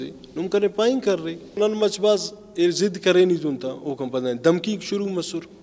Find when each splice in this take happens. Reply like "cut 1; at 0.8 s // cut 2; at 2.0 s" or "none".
cut 1; at 1.5 s